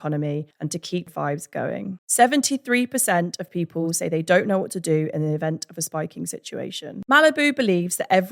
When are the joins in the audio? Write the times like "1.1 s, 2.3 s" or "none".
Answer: 6.9 s

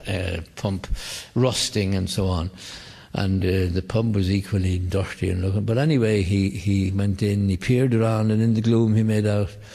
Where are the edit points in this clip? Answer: none

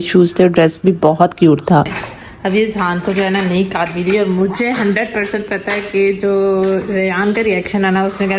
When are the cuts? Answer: none

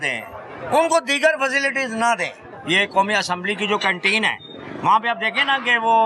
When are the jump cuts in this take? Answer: 2.5 s

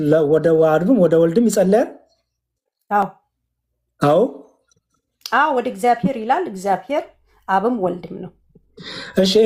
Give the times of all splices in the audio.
none

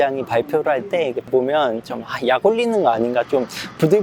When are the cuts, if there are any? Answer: 1.3 s

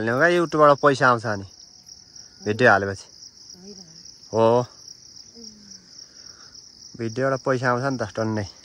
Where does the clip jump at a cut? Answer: none

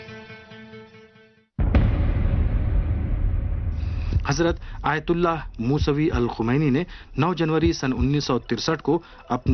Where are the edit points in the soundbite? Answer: 8.2 s

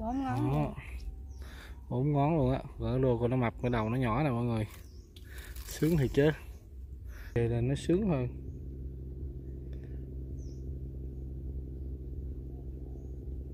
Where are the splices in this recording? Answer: 7.4 s

